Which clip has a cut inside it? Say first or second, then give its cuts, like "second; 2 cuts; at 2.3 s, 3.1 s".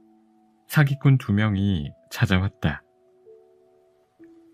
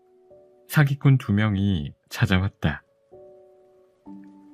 second; 1 cut; at 3.5 s